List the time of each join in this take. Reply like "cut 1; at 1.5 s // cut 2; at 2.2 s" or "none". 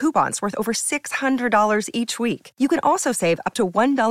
none